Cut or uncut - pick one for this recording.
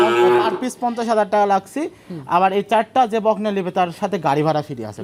uncut